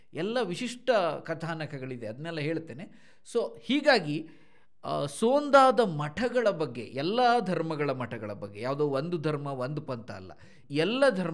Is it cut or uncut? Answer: uncut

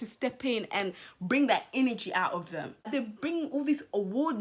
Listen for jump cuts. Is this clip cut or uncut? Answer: cut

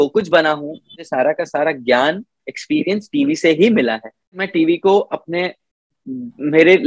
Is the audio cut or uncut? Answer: cut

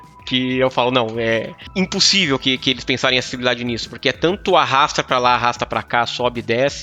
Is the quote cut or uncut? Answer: cut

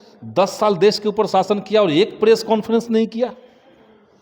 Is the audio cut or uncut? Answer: uncut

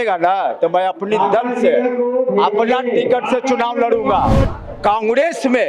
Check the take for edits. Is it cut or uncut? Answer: cut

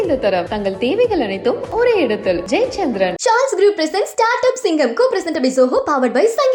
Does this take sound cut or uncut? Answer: uncut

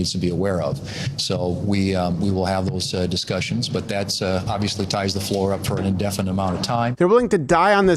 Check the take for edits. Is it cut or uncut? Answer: cut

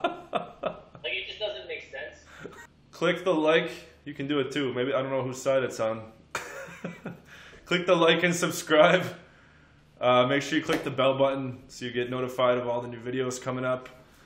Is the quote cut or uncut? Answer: cut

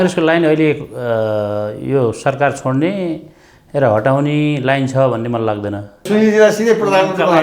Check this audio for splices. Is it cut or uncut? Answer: cut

